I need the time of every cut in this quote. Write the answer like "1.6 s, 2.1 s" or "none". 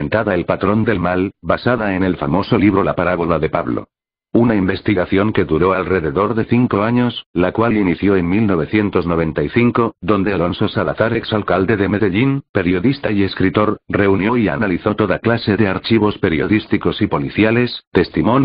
13.0 s